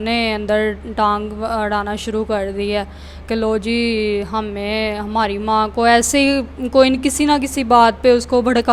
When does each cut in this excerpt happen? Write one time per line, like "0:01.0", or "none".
none